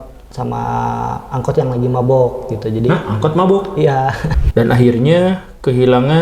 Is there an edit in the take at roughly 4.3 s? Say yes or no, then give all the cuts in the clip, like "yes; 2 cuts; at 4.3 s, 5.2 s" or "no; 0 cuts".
yes; 1 cut; at 4.3 s